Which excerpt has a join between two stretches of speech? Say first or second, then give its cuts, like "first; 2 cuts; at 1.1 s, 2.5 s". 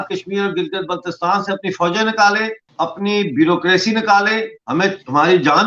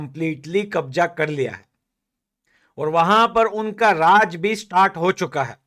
first; 2 cuts; at 2.6 s, 4.6 s